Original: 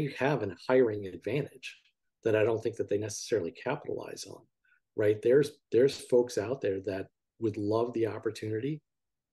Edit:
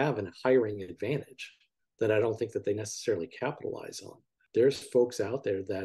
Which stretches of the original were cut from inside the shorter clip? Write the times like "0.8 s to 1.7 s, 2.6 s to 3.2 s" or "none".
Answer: 4.7 s to 5.6 s